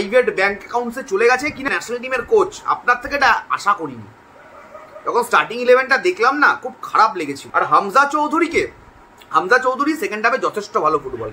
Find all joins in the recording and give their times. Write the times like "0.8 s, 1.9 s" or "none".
1.7 s, 7.4 s